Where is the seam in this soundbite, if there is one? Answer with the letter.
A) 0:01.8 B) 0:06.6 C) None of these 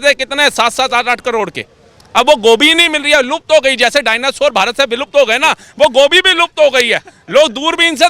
C